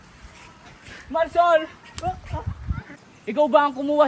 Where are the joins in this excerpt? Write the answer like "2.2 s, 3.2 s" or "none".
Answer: 2.9 s